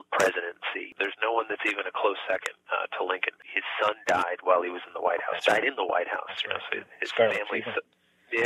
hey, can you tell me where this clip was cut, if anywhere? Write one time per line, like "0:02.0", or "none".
0:00.9
0:03.4